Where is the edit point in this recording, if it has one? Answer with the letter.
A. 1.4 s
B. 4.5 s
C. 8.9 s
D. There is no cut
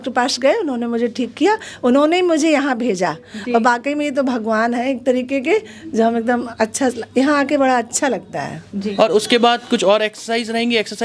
C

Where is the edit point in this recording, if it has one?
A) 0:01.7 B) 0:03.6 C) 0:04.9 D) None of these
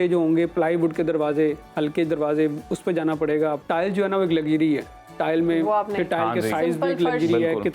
B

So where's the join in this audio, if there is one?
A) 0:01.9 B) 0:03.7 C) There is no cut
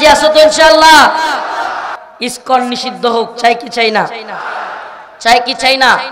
A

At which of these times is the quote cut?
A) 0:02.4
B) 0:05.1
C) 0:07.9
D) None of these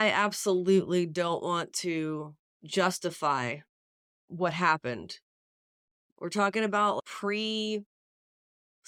D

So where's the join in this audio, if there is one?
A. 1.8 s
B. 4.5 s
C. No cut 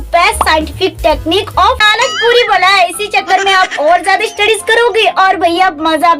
A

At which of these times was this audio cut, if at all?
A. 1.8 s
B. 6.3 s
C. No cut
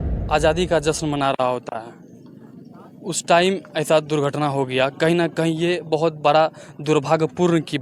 C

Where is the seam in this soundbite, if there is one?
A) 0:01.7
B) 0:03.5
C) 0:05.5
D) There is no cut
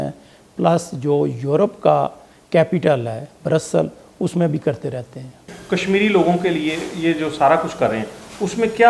C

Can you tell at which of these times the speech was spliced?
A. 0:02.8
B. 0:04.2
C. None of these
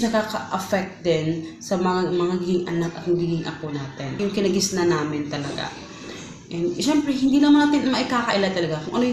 B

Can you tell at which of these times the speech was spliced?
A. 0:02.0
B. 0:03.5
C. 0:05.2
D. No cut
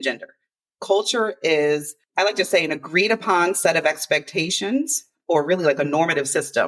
A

